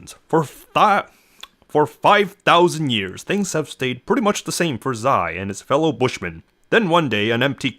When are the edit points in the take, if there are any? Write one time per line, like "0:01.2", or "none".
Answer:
0:06.0